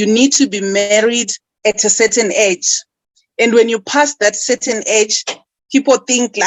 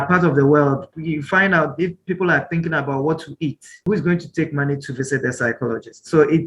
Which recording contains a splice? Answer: second; 2 cuts; at 0.9 s, 3.8 s

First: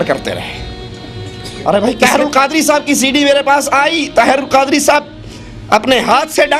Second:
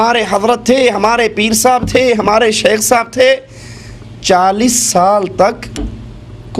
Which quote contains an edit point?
first; 1 cut; at 2.0 s

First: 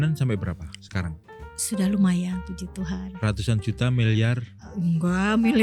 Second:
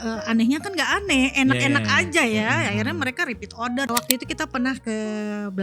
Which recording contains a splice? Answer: second; 1 cut; at 3.9 s

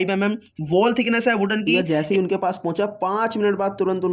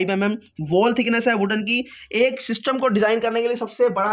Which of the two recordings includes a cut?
first; 1 cut; at 1.7 s

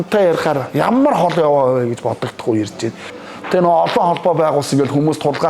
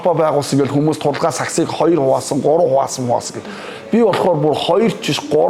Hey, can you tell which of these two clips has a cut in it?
first; 1 cut; at 3.1 s

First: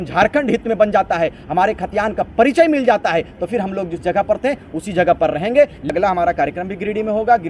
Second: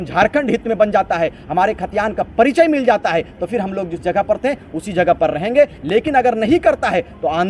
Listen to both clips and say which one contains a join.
first; 1 cut; at 5.9 s

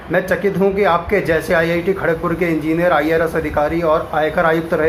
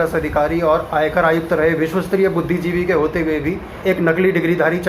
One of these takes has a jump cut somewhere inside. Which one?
second; 1 cut; at 3.7 s

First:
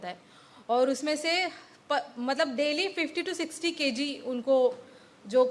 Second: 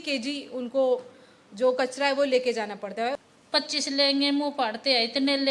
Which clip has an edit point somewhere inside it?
second; 1 cut; at 3.1 s

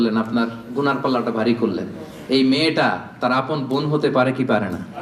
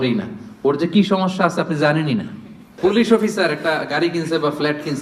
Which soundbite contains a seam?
second; 1 cut; at 2.7 s

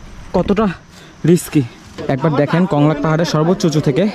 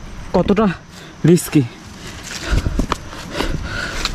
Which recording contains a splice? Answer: first; 1 cut; at 2.0 s

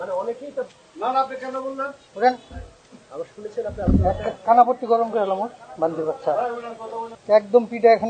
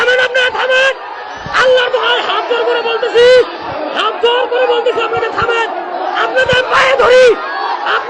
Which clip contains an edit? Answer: first; 2 cuts; at 2.0 s, 7.1 s

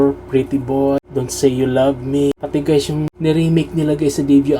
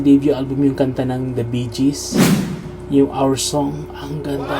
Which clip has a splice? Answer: first; 3 cuts; at 1.0 s, 2.3 s, 3.1 s

